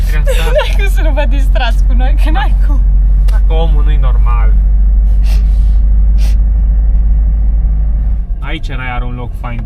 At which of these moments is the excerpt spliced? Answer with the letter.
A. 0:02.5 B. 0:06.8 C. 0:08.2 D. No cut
D